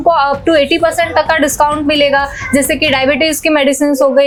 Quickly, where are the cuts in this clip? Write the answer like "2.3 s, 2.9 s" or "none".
none

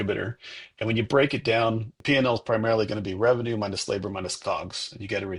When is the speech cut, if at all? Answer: 1.9 s

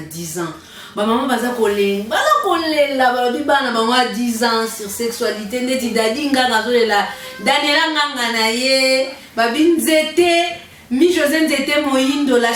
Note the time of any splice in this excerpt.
none

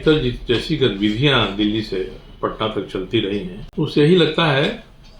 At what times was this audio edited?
3.6 s

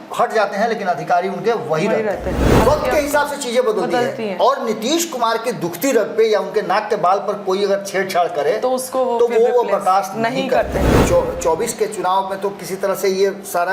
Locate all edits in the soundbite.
2.4 s, 10.9 s

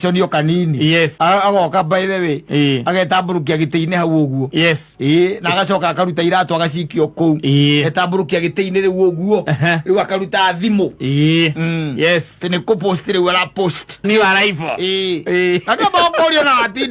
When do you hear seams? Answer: 1.1 s, 14.0 s

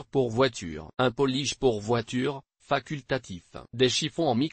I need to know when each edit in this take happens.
3.5 s

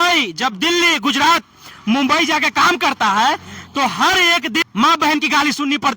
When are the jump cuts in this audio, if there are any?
4.6 s

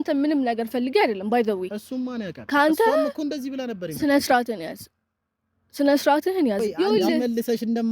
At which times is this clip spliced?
6.6 s

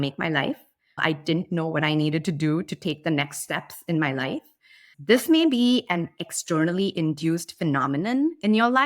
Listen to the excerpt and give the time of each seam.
4.9 s

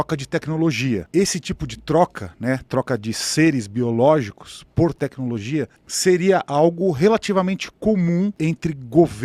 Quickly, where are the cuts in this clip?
1.0 s, 8.4 s

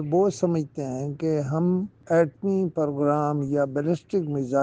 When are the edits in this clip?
2.0 s

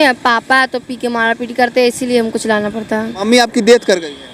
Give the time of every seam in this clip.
3.1 s

